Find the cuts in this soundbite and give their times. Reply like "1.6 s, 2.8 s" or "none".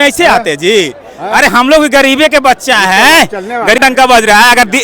3.8 s